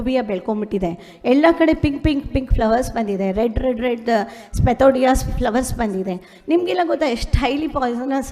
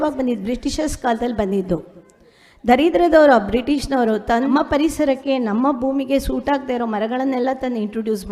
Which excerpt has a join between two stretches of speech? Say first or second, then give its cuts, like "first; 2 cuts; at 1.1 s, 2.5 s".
second; 1 cut; at 4.5 s